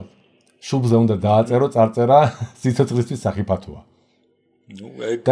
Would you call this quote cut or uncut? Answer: uncut